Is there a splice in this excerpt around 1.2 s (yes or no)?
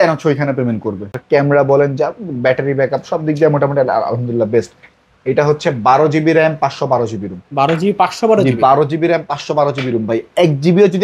yes